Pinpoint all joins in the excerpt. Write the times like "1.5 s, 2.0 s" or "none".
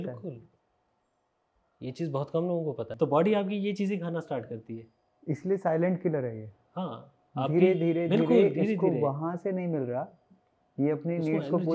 2.9 s